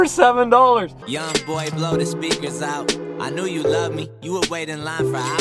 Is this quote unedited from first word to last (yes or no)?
no